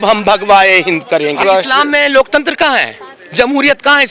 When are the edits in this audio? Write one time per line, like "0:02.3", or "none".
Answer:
0:01.4

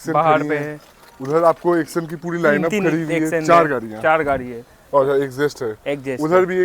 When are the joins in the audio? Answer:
none

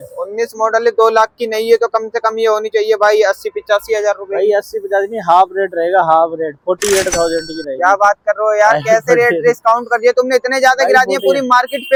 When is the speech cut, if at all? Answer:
none

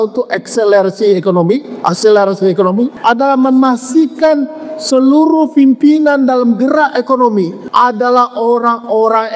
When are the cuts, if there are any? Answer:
0:03.0
0:07.6

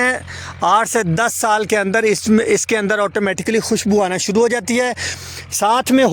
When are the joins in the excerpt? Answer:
0:05.0

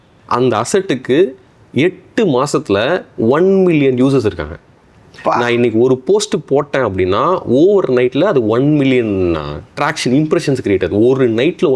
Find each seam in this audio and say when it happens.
none

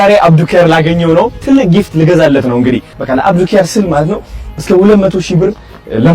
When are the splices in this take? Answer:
0:02.9

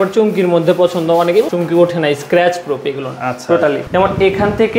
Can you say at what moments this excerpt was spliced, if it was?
0:01.5
0:03.8

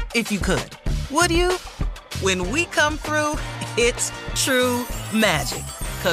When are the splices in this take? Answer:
none

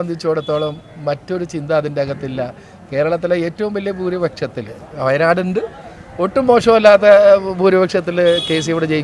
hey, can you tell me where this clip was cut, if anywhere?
none

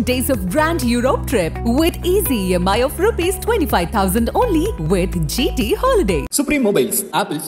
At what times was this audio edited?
none

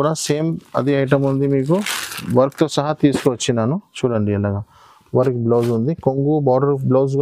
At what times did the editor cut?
none

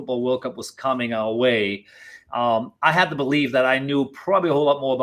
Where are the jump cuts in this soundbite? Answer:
none

